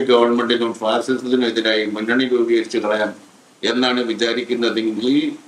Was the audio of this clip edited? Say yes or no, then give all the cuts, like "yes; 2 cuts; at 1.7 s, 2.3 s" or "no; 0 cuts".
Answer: no; 0 cuts